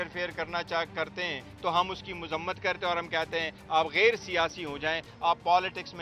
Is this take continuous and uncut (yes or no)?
yes